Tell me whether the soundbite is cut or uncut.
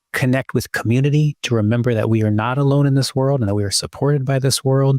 uncut